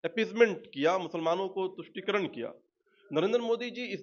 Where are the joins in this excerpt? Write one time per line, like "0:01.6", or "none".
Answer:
none